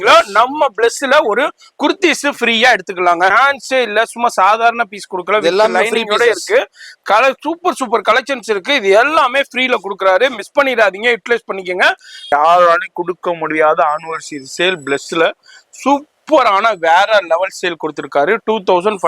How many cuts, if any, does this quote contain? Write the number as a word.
two